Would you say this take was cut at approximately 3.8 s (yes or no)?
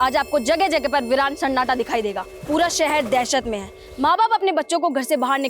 no